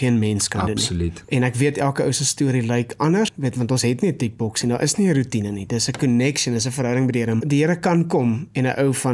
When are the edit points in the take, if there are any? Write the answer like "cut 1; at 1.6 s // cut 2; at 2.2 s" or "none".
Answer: cut 1; at 1.2 s // cut 2; at 3.4 s // cut 3; at 7.4 s